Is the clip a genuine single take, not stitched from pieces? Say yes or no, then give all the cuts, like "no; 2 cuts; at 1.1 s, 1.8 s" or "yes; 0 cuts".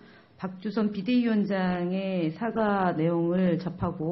no; 1 cut; at 1.0 s